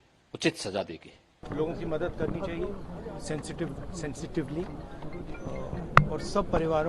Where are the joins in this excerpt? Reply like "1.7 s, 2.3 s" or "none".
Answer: 1.4 s